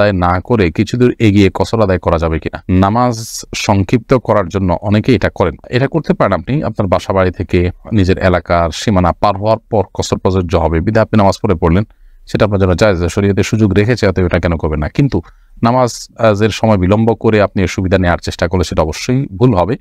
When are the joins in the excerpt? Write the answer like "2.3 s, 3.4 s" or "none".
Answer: none